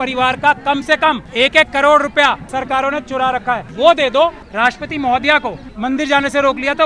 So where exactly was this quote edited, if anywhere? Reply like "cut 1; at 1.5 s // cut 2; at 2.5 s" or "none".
cut 1; at 1.3 s // cut 2; at 2.4 s // cut 3; at 3.7 s // cut 4; at 4.4 s // cut 5; at 5.6 s

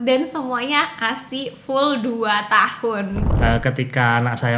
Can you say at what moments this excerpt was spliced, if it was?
cut 1; at 3.3 s

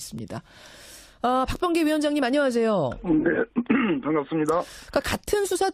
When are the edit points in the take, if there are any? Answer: none

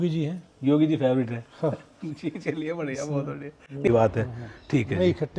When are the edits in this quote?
cut 1; at 3.9 s

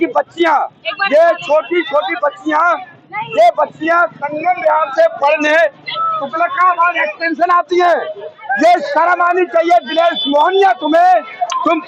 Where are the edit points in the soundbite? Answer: none

